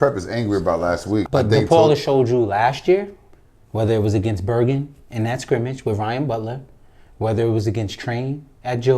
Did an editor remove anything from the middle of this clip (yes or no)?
yes